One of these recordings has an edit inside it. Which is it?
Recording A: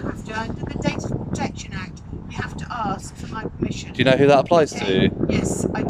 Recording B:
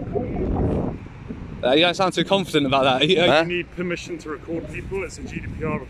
B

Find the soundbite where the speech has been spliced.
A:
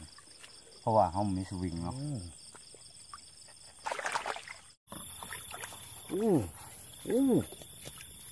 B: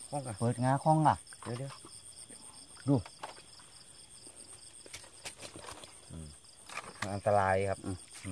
A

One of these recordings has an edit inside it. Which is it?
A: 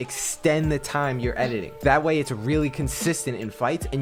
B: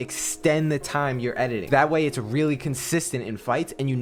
B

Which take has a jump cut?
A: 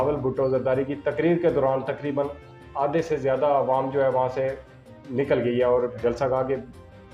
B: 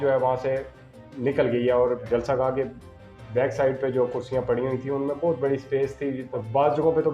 B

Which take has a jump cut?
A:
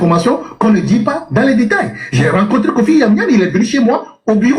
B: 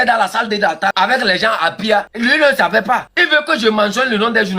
B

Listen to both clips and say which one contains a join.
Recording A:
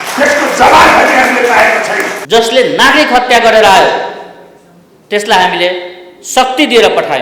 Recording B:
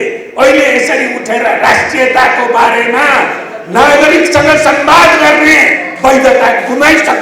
A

